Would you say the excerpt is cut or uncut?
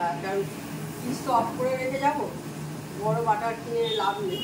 uncut